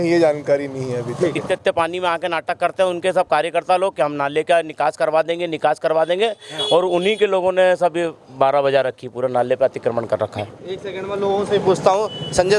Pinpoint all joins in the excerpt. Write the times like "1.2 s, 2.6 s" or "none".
1.5 s, 10.5 s